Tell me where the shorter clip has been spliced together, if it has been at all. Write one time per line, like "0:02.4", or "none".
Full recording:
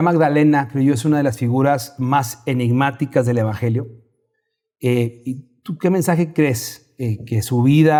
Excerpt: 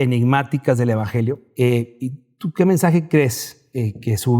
0:01.5